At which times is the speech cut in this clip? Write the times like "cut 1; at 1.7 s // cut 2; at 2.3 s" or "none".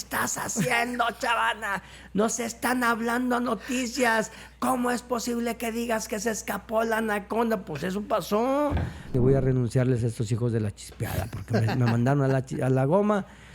cut 1; at 9.1 s